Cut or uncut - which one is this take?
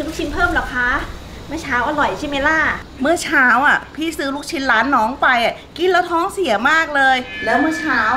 uncut